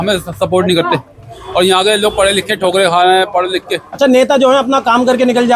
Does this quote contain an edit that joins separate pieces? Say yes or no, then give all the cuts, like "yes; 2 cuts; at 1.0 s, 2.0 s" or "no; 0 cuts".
no; 0 cuts